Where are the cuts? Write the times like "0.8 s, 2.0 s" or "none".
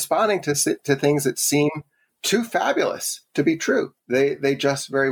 2.1 s